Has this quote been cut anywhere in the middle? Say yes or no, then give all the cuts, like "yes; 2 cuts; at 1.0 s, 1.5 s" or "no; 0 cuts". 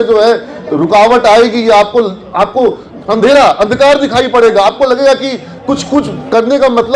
no; 0 cuts